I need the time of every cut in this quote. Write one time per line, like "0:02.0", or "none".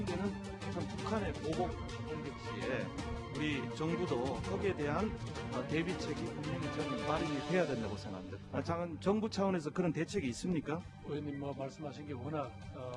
none